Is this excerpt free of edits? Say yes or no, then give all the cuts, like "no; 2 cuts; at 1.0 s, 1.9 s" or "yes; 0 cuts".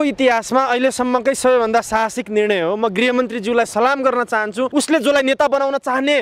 no; 1 cut; at 4.7 s